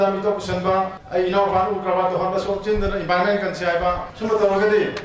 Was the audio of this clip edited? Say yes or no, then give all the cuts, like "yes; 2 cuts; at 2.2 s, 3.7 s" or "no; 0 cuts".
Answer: yes; 2 cuts; at 1.0 s, 4.1 s